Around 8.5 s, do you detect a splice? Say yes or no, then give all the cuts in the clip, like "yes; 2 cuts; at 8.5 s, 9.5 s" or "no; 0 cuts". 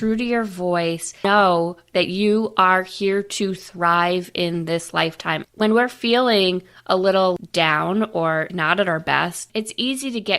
yes; 5 cuts; at 1.2 s, 5.4 s, 7.4 s, 8.5 s, 9.4 s